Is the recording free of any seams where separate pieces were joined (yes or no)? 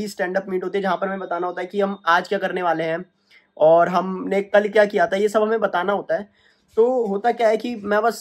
yes